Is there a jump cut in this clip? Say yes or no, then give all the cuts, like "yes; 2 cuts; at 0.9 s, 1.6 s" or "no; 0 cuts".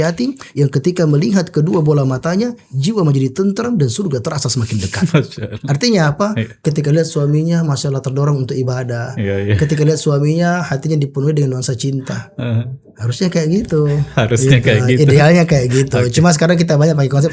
no; 0 cuts